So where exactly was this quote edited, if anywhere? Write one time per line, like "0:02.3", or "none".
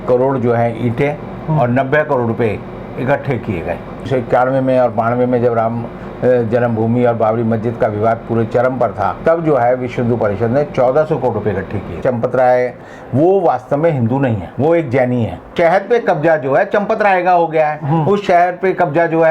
0:04.0
0:09.2
0:12.0
0:12.9
0:15.5